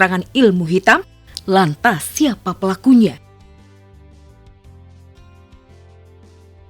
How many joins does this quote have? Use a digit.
1